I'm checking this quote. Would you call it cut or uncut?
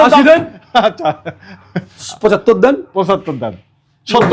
uncut